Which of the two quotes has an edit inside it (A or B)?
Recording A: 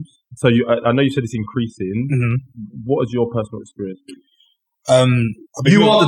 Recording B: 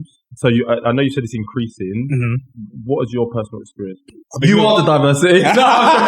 B